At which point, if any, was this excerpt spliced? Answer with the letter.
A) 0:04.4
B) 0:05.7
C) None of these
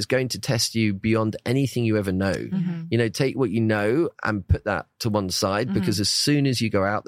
C